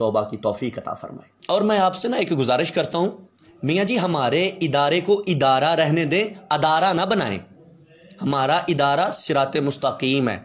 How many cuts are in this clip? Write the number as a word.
zero